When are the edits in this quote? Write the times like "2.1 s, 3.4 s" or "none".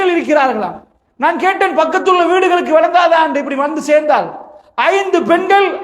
none